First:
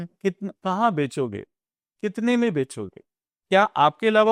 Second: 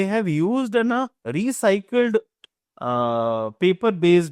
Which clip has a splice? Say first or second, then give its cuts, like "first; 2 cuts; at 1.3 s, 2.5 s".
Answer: second; 1 cut; at 1.2 s